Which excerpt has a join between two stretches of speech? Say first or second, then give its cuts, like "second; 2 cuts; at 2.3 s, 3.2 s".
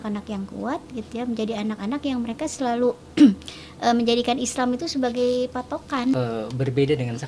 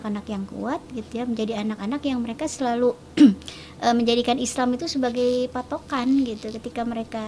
first; 1 cut; at 6.1 s